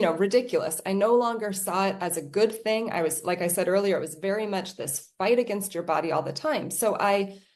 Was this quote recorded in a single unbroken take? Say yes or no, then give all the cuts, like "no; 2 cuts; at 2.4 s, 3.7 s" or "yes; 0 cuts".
yes; 0 cuts